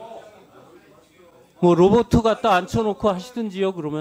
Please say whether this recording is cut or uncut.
uncut